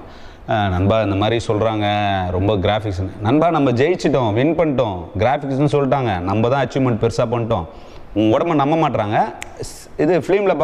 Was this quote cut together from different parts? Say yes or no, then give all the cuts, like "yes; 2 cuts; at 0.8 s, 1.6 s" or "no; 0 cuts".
no; 0 cuts